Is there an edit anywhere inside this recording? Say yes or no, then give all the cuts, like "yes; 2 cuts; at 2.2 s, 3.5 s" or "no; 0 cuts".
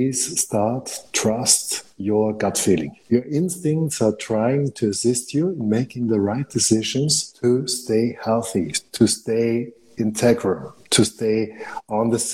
yes; 2 cuts; at 2.9 s, 7.2 s